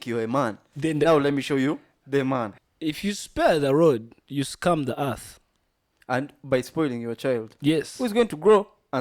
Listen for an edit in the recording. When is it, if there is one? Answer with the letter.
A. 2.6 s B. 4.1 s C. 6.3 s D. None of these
A